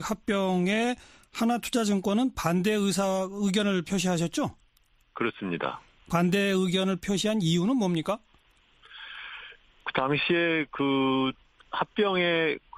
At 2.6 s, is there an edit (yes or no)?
no